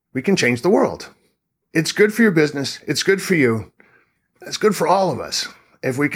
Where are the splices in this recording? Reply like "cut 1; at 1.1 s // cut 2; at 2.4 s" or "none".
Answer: cut 1; at 1.6 s